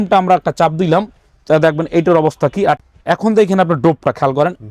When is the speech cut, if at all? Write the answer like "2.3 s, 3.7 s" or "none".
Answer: 2.8 s